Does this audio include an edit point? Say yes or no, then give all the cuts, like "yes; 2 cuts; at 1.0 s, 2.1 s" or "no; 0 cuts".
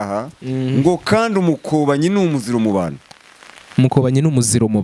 no; 0 cuts